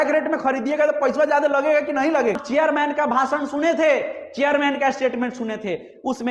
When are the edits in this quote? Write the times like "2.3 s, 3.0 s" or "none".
2.4 s